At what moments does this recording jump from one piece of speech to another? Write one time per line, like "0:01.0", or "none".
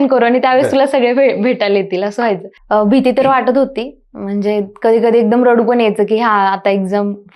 0:02.5